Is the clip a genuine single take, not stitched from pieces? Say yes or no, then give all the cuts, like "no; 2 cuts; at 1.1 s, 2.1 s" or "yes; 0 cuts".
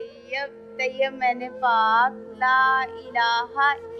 yes; 0 cuts